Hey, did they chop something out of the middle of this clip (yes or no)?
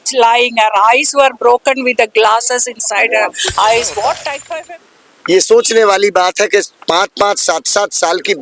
yes